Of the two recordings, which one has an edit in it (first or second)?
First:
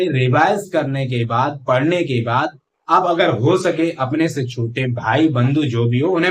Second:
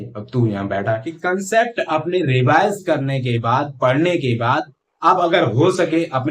second